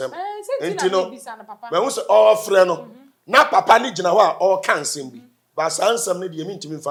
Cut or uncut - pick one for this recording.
uncut